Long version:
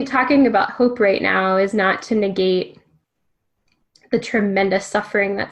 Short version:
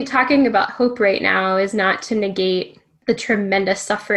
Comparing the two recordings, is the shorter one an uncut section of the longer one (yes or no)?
no